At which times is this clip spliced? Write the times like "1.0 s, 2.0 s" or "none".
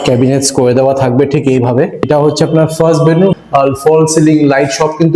2.1 s, 3.4 s